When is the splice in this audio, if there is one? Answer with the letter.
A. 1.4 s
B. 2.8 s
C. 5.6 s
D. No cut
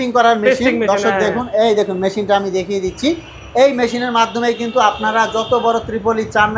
D